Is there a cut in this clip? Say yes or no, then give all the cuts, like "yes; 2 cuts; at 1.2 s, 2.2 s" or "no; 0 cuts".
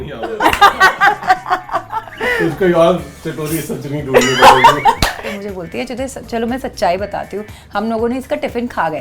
yes; 1 cut; at 5.3 s